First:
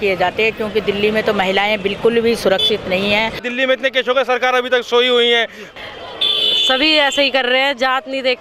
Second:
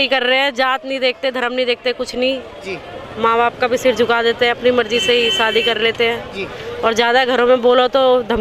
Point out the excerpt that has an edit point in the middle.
first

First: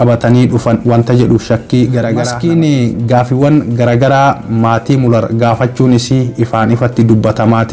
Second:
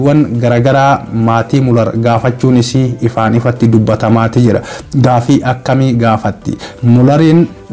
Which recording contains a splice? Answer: first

